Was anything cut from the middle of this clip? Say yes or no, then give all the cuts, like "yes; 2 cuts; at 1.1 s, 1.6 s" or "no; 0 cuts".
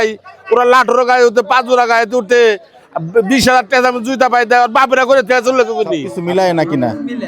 yes; 1 cut; at 6.1 s